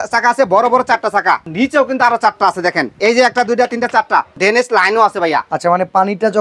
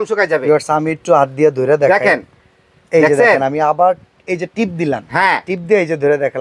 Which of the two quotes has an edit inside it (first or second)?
first